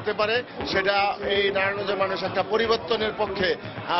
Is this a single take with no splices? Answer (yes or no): yes